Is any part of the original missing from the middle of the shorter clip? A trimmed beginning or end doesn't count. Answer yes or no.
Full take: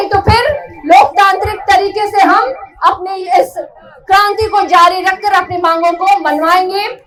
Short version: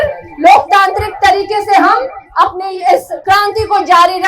yes